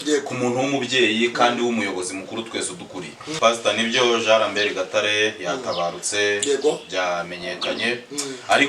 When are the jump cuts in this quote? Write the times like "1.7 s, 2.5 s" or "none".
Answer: 3.4 s